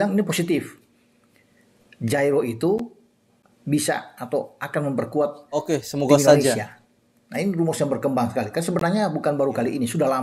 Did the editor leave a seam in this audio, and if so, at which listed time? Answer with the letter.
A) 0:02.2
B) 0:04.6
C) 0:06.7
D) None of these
D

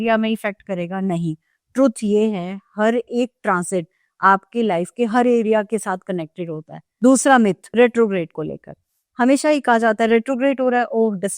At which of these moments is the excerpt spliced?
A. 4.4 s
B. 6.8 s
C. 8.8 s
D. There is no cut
B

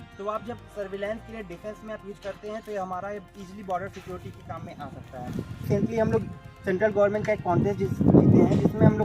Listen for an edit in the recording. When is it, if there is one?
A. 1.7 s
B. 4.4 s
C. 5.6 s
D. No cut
C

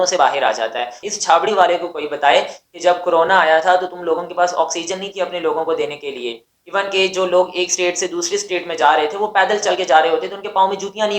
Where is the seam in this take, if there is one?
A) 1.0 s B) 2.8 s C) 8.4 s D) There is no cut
A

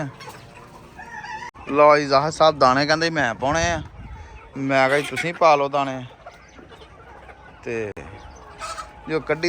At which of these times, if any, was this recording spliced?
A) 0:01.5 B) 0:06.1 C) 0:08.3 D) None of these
A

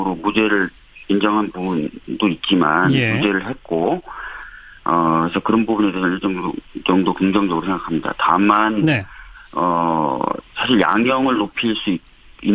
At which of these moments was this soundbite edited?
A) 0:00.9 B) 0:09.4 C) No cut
A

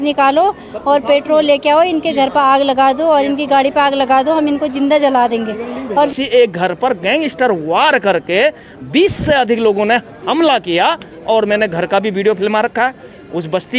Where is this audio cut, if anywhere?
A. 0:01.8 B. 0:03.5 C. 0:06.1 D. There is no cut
C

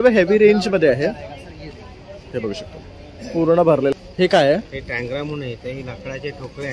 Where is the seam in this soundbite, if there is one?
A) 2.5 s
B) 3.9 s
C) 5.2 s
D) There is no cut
B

